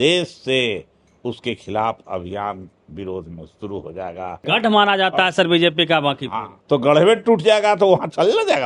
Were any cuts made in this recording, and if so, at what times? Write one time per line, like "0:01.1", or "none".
0:04.4
0:06.5

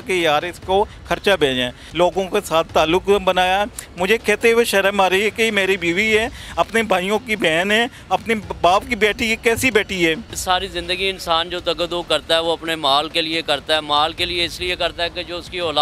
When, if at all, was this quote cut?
0:01.8
0:10.3

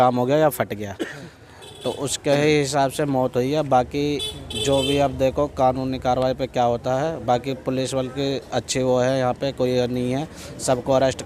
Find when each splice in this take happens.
none

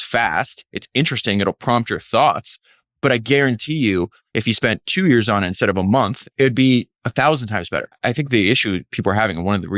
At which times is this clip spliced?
0:06.3
0:07.0
0:07.9

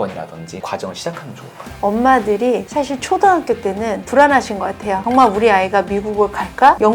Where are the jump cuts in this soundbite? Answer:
none

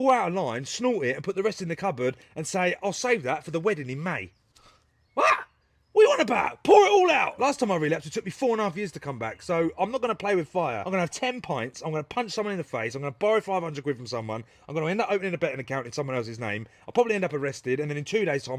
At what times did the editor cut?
0:07.3
0:10.9

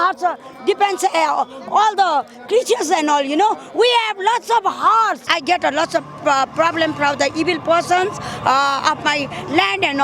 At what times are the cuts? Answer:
0:05.3

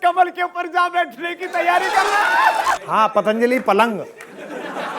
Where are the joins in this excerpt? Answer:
0:02.8

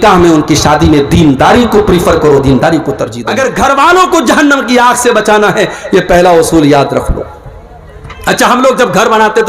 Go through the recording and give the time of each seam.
0:03.1

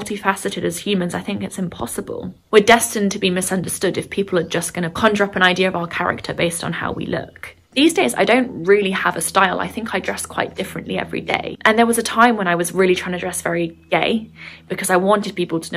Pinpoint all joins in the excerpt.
0:02.3
0:11.6

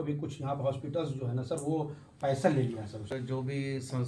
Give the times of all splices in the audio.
0:03.1

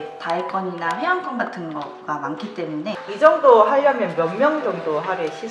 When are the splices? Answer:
0:03.0

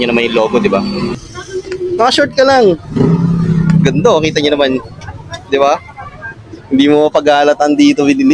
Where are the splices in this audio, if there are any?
0:01.1

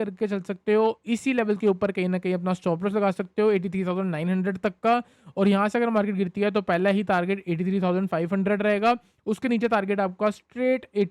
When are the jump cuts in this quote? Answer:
none

